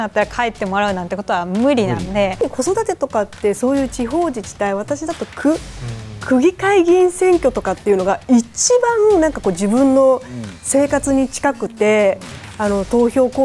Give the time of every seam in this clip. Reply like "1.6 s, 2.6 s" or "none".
2.4 s